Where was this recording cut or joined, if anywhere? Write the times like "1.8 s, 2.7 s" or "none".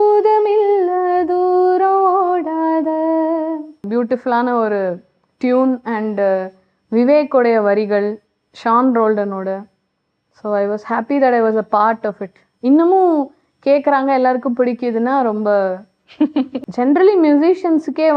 3.8 s, 16.6 s